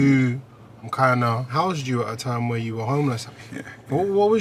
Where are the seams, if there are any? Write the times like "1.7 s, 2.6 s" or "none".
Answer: 1.5 s, 3.2 s